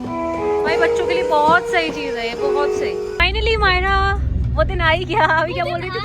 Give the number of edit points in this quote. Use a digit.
1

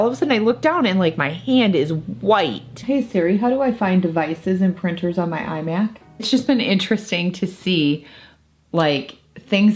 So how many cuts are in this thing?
2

